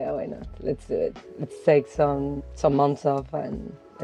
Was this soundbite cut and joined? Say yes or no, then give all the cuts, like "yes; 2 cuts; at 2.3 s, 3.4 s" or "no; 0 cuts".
yes; 1 cut; at 2.4 s